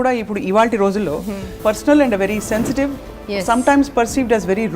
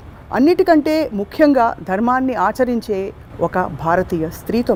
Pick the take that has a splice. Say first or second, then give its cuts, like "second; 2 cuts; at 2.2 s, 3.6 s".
first; 1 cut; at 1.6 s